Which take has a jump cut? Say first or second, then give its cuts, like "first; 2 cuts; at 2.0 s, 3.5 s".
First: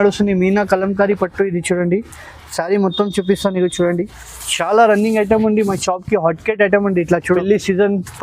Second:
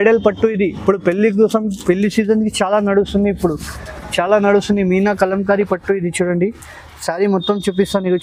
first; 1 cut; at 7.3 s